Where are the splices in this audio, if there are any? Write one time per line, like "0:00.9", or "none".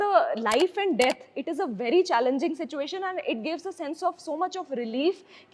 none

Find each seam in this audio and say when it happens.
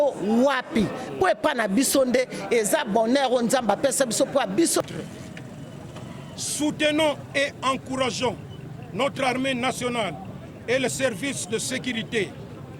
0:04.9

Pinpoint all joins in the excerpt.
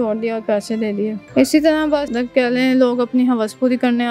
0:01.2
0:02.1

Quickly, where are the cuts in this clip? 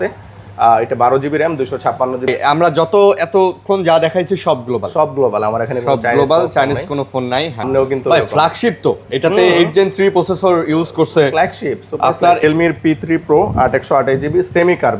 0:02.3
0:07.7
0:12.4

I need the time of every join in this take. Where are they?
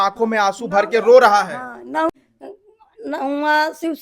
0:02.1

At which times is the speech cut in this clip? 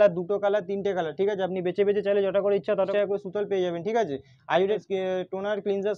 0:02.9
0:04.8

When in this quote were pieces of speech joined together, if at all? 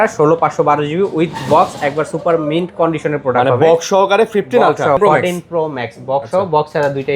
0:05.0

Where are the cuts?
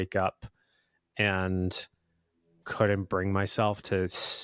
0:02.6

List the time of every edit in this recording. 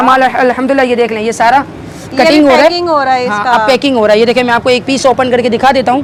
none

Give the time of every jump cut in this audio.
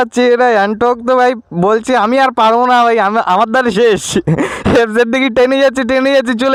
none

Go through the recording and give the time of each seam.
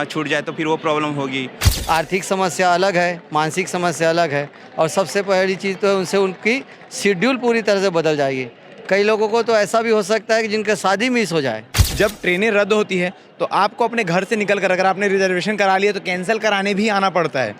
0:01.6
0:11.9

